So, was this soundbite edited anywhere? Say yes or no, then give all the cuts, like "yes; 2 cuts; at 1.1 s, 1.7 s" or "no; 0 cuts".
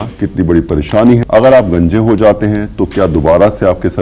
yes; 1 cut; at 1.2 s